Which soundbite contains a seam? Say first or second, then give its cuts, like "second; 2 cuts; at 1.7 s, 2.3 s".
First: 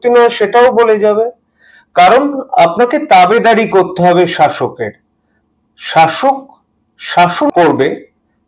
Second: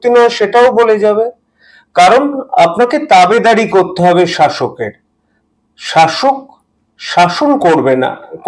first; 1 cut; at 7.5 s